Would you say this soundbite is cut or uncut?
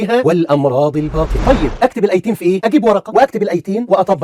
cut